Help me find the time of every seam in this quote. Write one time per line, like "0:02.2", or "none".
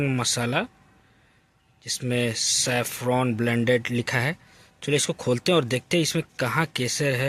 none